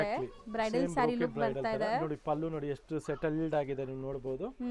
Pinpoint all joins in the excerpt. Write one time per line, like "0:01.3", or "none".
none